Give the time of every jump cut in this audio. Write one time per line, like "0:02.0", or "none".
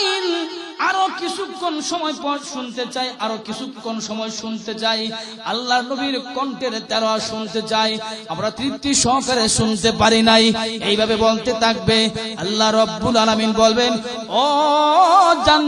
0:08.6

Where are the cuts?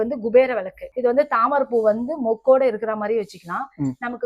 0:00.9

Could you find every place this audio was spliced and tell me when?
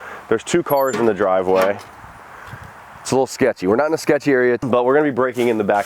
0:04.6

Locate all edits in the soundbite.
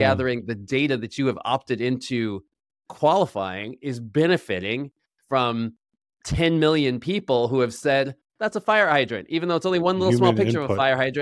none

